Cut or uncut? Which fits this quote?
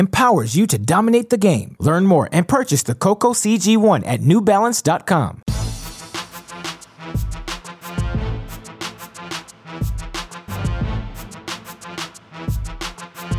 cut